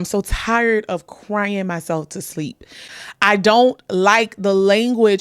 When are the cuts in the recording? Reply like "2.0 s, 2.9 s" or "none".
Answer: 2.8 s